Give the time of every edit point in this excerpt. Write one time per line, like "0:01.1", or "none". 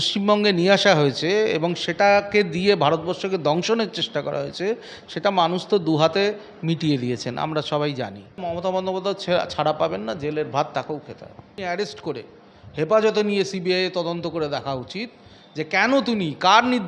0:08.5
0:11.5